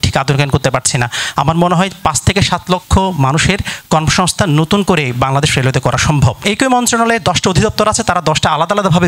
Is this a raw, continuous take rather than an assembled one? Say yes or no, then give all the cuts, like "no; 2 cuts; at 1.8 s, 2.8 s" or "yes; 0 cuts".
no; 1 cut; at 6.4 s